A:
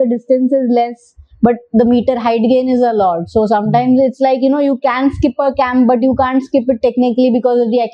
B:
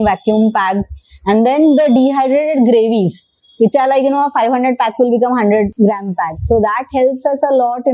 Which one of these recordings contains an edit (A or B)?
B